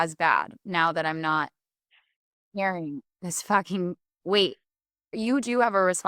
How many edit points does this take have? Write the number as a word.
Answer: one